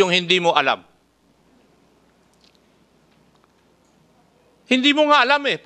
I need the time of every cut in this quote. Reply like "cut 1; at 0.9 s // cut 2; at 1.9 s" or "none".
none